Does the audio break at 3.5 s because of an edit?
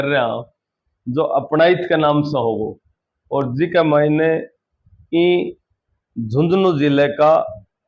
no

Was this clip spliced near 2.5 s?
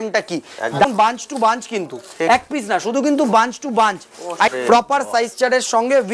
no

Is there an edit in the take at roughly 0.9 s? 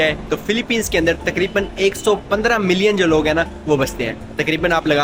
no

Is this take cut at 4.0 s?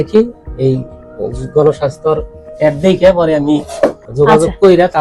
yes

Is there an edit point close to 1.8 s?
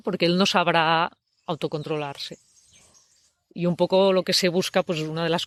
no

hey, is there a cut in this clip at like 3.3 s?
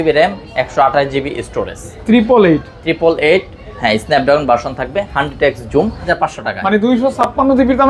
no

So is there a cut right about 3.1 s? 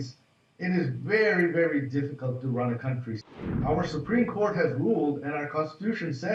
yes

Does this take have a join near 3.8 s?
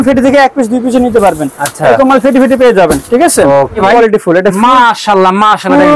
yes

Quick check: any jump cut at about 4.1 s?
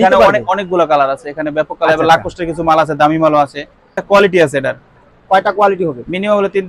yes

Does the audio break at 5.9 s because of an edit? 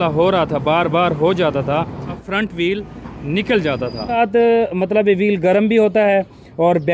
no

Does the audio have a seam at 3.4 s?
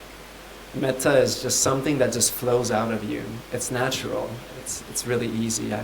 yes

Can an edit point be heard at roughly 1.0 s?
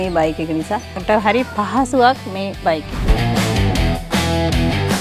yes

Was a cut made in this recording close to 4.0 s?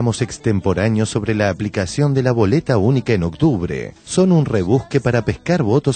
no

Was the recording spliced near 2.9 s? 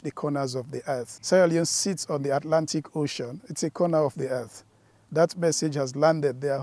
no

